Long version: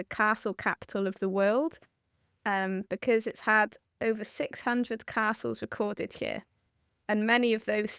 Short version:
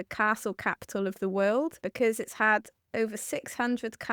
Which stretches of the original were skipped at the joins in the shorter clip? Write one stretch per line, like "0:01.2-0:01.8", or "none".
0:01.8-0:02.9

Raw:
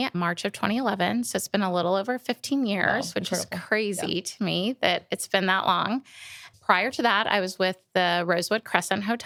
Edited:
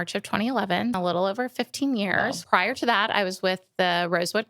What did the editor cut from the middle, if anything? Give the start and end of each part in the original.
0:01.3-0:01.7
0:03.1-0:06.6

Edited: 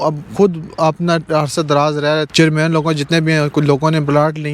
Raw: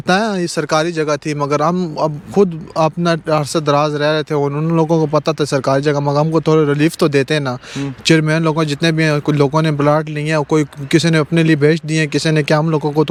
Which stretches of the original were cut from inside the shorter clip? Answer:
0:04.2-0:08.0

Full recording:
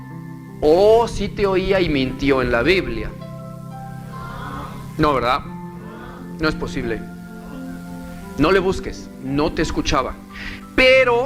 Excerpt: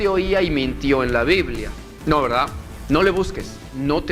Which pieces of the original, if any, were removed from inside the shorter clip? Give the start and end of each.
0:03.2-0:04.8
0:05.6-0:08.2

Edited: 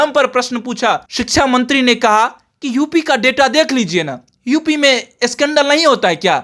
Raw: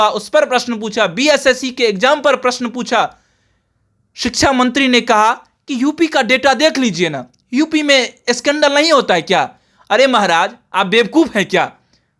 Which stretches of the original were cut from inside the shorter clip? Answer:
0:03.2-0:04.2

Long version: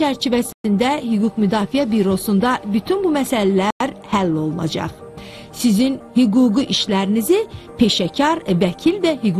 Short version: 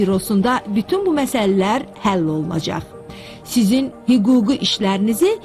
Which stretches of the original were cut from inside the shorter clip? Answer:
0:03.7-0:03.8

